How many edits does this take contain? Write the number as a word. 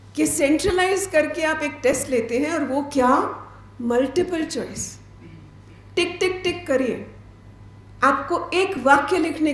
zero